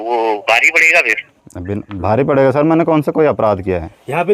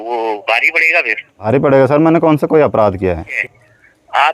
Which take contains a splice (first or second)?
second